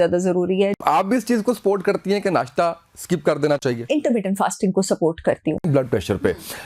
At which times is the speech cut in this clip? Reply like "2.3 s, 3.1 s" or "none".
0.8 s, 3.9 s, 5.7 s